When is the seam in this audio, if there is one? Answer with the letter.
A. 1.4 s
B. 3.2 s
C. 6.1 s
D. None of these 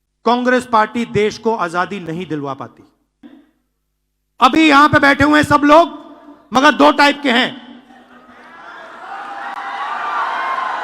B